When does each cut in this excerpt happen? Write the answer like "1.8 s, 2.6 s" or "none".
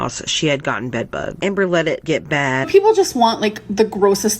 1.4 s, 2.7 s